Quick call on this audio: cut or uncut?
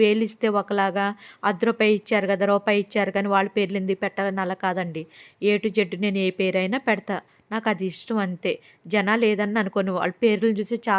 uncut